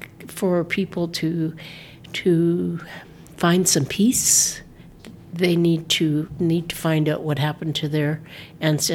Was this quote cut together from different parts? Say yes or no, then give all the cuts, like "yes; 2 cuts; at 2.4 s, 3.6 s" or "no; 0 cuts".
no; 0 cuts